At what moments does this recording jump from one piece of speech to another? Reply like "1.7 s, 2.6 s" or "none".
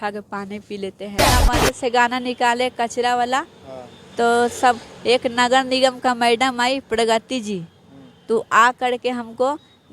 1.2 s